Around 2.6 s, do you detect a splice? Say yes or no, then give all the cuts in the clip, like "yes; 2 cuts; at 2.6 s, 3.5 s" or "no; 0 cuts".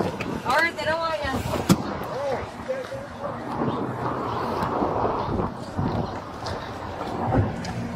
no; 0 cuts